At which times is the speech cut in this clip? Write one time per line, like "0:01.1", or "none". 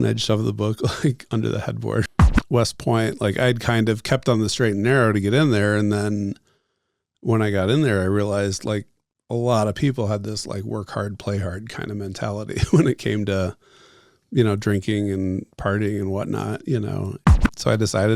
0:02.1
0:17.4